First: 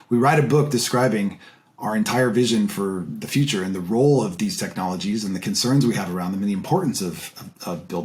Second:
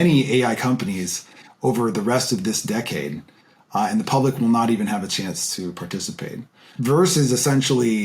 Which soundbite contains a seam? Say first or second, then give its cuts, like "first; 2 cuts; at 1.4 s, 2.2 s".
second; 1 cut; at 6.4 s